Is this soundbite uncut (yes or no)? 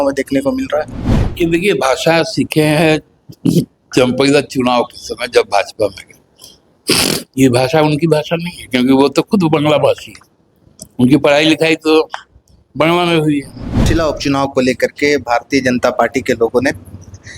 no